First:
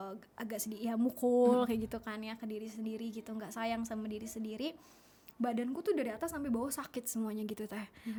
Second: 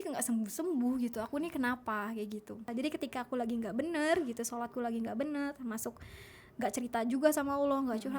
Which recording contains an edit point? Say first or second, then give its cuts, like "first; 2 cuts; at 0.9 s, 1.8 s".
second; 1 cut; at 2.7 s